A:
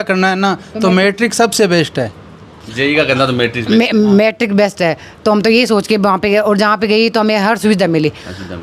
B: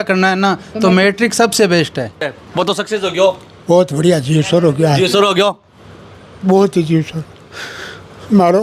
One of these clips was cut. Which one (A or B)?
B